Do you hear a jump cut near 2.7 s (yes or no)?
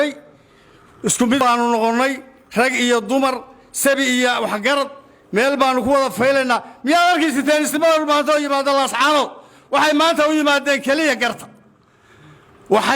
no